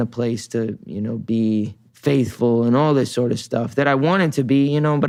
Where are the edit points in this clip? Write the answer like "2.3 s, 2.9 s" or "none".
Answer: none